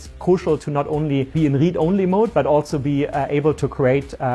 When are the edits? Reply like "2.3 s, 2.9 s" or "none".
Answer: 1.3 s